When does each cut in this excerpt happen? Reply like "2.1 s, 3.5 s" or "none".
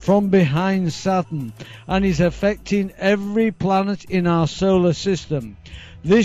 none